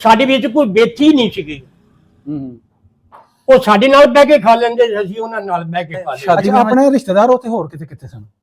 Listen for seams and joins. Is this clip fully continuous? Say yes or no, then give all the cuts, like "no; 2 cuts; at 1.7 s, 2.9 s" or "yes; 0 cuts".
no; 1 cut; at 6.5 s